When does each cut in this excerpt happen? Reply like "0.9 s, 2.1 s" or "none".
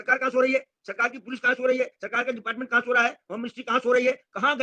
none